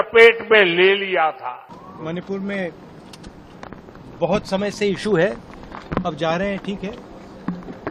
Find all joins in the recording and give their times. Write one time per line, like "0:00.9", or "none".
0:01.9